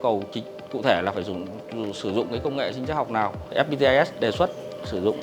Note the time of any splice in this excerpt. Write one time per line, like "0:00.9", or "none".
0:03.5

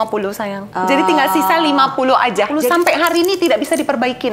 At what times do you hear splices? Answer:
0:02.6

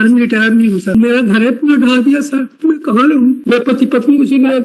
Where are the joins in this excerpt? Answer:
0:01.0

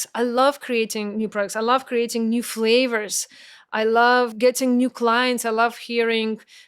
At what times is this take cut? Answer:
0:04.3

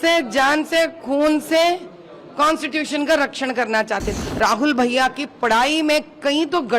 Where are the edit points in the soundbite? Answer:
0:04.1

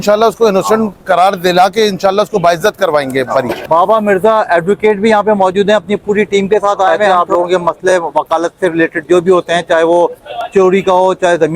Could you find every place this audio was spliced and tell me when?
0:03.6
0:07.0

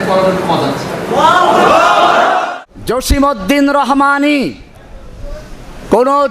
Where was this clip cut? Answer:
0:02.5

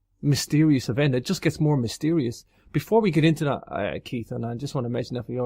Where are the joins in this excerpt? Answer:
0:03.9

